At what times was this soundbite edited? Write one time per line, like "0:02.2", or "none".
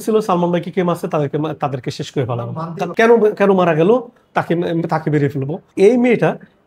0:02.9
0:05.6